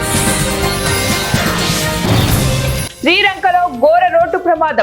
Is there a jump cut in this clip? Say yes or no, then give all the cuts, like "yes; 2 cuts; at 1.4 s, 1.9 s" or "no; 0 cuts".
no; 0 cuts